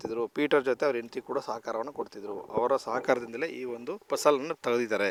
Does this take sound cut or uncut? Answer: uncut